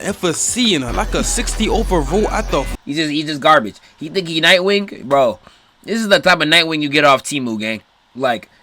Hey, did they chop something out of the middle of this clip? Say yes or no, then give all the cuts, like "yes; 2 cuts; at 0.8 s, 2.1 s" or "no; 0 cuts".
yes; 1 cut; at 2.7 s